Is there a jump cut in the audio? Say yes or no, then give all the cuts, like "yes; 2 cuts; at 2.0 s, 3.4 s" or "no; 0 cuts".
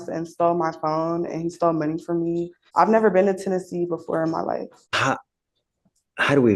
yes; 2 cuts; at 2.6 s, 4.8 s